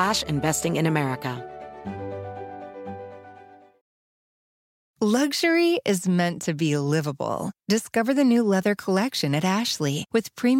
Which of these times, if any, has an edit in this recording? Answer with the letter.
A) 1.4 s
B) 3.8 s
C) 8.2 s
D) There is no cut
A